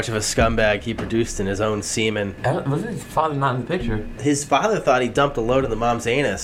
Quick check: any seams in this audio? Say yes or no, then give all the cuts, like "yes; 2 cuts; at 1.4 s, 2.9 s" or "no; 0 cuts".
yes; 2 cuts; at 2.3 s, 4.1 s